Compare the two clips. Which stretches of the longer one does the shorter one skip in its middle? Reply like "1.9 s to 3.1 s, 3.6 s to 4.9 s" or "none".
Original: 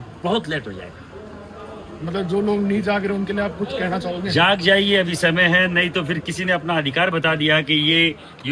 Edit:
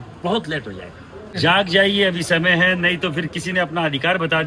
1.3 s to 4.2 s